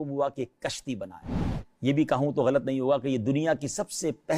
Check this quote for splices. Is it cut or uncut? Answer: uncut